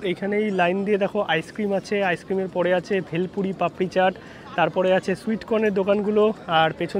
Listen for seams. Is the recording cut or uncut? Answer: uncut